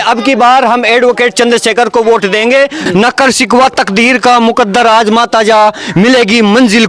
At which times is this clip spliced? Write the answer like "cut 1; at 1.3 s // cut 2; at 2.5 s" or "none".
cut 1; at 2.8 s